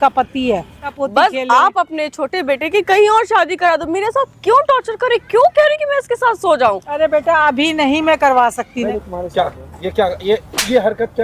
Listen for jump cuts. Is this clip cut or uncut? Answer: cut